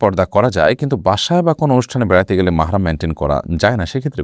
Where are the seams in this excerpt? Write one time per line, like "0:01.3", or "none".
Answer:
none